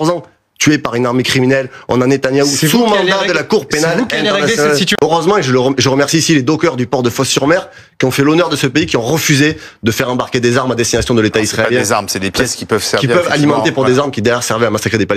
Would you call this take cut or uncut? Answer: cut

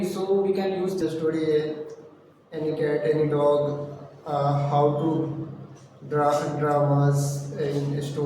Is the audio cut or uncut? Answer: cut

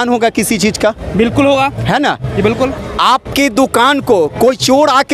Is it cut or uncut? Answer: uncut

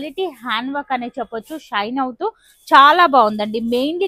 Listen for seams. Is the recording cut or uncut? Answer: uncut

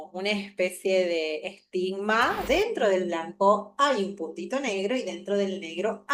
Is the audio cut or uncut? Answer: cut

